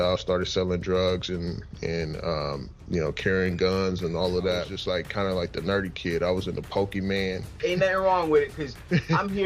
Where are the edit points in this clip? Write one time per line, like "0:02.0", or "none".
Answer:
0:04.7
0:07.5